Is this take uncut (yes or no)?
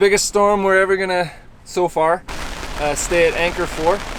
yes